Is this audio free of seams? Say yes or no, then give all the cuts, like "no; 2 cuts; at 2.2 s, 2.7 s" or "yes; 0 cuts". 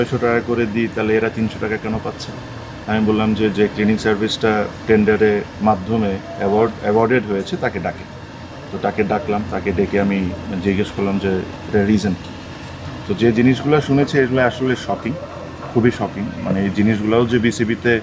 yes; 0 cuts